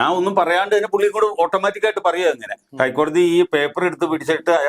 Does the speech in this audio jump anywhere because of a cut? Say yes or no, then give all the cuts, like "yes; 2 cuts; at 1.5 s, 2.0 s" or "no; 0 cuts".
yes; 1 cut; at 2.6 s